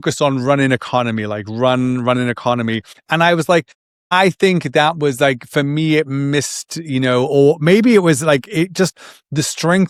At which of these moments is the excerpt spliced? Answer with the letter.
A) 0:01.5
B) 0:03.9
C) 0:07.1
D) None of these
D